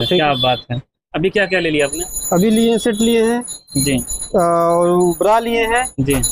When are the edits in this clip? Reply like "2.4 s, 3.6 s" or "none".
none